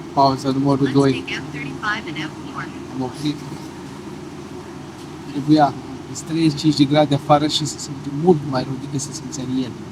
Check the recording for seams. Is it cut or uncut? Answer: uncut